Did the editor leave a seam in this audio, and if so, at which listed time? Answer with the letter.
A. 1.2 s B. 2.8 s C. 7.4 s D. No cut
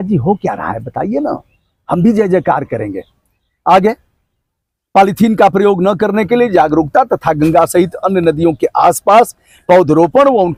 D